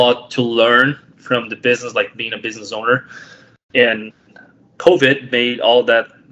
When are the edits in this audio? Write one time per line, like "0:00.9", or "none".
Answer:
none